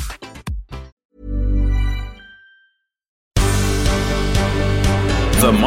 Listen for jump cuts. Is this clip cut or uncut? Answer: cut